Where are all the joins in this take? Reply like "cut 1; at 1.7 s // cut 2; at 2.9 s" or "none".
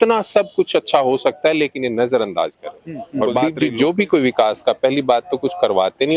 cut 1; at 3.4 s

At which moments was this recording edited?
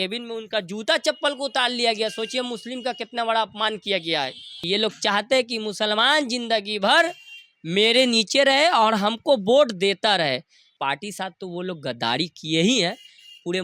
cut 1; at 4.6 s // cut 2; at 10.7 s

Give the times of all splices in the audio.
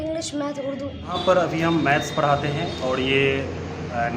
cut 1; at 1.1 s

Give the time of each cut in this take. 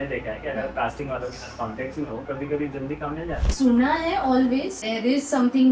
cut 1; at 2.2 s // cut 2; at 3.5 s // cut 3; at 4.8 s

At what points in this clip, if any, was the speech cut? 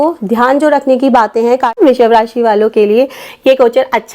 cut 1; at 1.8 s

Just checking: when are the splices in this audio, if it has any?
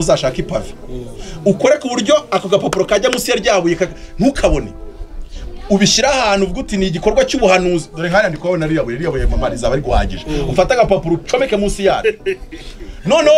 none

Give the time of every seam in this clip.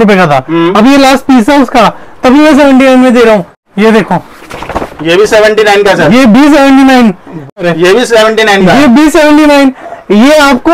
cut 1; at 3.6 s // cut 2; at 7.6 s

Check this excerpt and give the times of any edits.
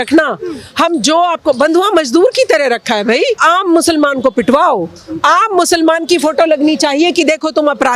cut 1; at 3.4 s

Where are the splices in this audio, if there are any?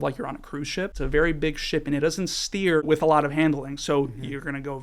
cut 1; at 0.9 s // cut 2; at 2.8 s

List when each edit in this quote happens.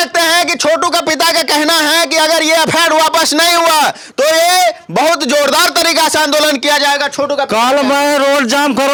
none

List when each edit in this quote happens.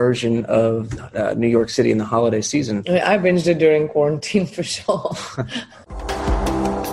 cut 1; at 2.8 s // cut 2; at 5.8 s

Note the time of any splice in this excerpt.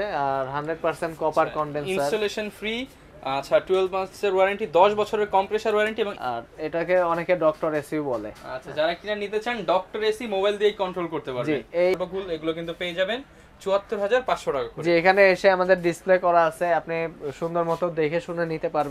cut 1; at 6.2 s // cut 2; at 11.9 s

